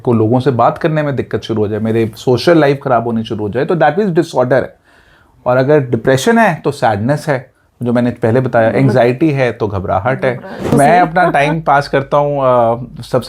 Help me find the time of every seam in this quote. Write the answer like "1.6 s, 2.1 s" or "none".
10.7 s